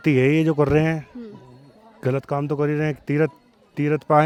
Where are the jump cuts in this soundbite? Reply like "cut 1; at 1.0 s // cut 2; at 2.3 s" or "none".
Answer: none